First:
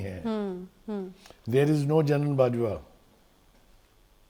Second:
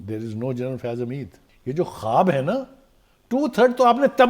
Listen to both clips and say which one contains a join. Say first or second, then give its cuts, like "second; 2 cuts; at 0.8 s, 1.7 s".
second; 1 cut; at 1.4 s